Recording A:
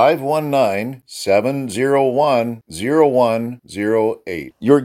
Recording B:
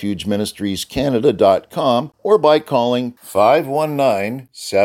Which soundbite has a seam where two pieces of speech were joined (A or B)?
B